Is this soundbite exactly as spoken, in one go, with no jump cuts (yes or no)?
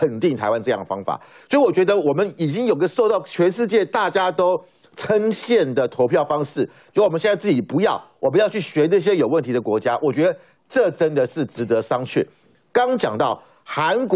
yes